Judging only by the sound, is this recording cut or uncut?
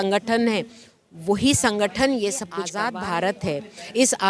cut